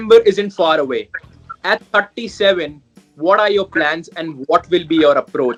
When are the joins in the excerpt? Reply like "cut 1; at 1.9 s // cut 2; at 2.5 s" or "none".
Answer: none